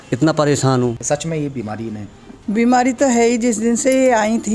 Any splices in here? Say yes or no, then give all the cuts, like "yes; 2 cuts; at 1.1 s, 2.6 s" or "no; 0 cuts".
yes; 1 cut; at 1.0 s